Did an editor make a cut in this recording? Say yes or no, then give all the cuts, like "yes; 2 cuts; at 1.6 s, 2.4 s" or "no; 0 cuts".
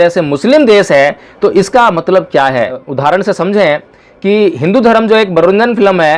yes; 1 cut; at 2.8 s